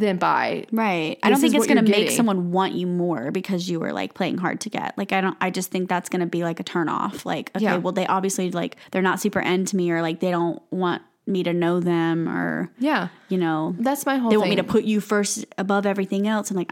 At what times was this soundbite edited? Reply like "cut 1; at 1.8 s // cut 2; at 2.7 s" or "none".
cut 1; at 8.8 s